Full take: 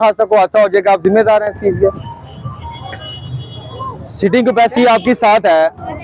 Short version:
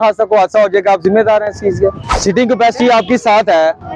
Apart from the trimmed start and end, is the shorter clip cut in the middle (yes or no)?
yes